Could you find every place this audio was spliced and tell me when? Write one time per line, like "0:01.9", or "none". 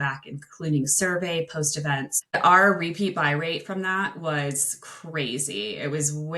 0:02.3